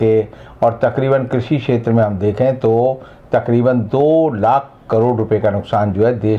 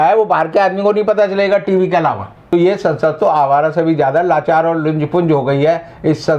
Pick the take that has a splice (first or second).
second